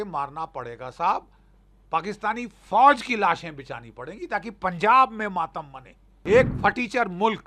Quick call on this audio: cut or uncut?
cut